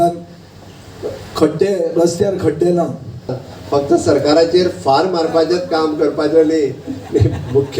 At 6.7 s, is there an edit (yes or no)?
no